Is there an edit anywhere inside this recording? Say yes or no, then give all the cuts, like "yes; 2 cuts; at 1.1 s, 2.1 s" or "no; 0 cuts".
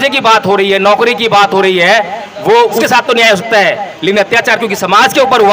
yes; 1 cut; at 2.8 s